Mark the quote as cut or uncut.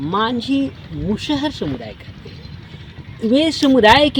uncut